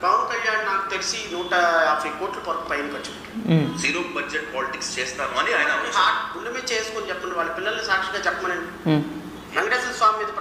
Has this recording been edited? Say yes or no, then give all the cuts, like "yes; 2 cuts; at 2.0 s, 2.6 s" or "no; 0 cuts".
no; 0 cuts